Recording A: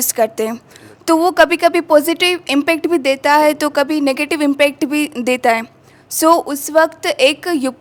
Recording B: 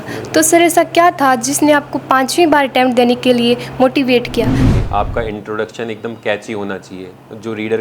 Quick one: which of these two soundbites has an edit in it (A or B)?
B